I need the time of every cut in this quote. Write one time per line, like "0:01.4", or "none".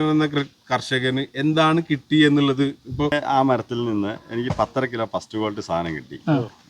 0:03.1